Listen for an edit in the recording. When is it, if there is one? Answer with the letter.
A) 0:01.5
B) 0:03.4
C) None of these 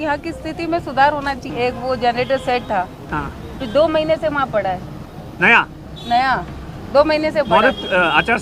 A